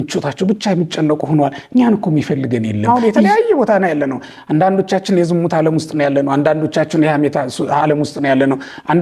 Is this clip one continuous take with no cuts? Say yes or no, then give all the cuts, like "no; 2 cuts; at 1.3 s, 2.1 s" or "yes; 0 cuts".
no; 1 cut; at 2.9 s